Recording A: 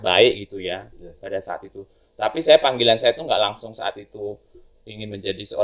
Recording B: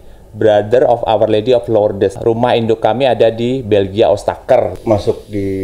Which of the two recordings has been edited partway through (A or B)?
B